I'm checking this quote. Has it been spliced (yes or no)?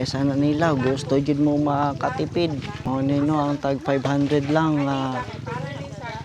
yes